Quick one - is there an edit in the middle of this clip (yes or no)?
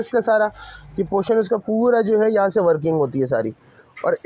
no